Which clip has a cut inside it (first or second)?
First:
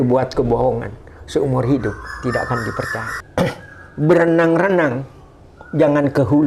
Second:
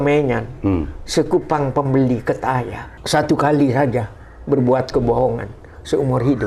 first